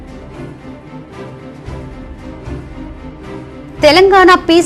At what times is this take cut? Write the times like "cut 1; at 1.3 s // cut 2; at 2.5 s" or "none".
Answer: cut 1; at 1.0 s